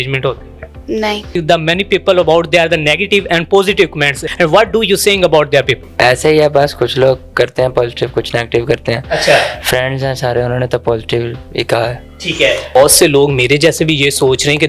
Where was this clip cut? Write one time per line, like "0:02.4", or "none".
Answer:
0:01.4
0:04.2
0:05.9
0:12.8

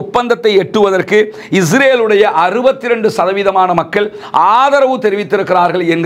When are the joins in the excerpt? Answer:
none

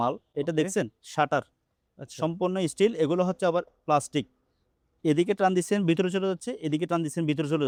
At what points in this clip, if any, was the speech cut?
none

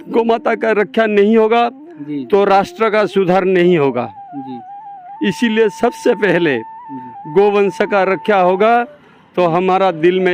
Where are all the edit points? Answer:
none

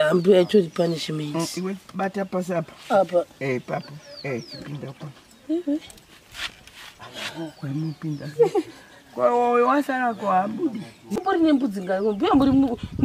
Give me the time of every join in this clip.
0:11.1

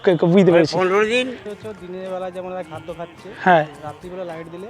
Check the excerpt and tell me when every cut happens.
0:01.4

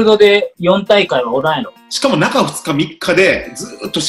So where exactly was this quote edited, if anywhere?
0:01.8

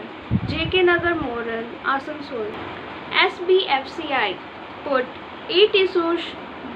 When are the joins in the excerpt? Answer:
0:02.6

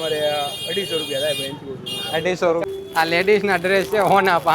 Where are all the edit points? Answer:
0:02.6

